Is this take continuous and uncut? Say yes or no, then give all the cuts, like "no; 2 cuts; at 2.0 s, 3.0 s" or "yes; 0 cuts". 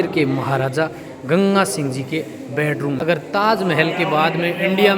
no; 1 cut; at 3.0 s